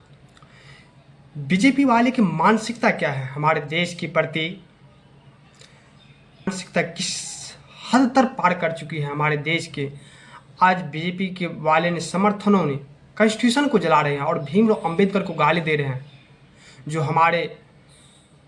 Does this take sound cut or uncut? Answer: cut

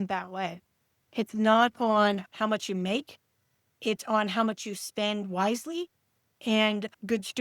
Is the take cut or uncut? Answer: uncut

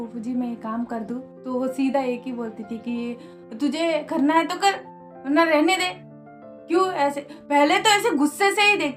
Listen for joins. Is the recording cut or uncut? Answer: uncut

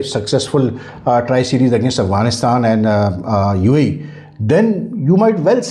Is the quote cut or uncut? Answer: uncut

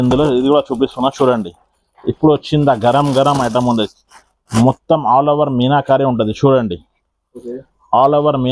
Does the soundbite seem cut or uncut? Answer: uncut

